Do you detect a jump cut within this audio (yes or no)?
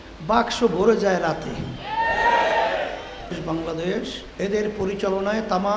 yes